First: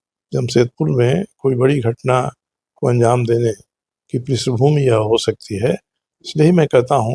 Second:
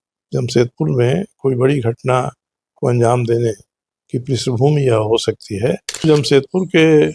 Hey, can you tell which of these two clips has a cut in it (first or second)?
second